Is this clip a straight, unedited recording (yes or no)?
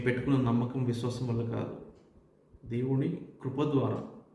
yes